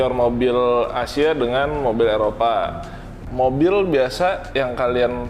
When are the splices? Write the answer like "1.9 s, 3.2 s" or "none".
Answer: 3.1 s